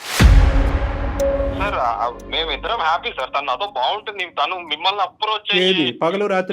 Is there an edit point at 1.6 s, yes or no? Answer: yes